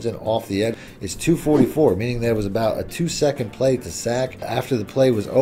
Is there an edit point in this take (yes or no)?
yes